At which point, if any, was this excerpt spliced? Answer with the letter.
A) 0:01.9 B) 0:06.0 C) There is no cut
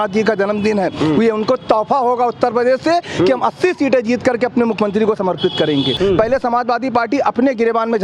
B